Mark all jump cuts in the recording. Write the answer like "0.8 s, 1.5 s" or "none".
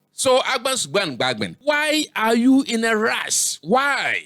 1.6 s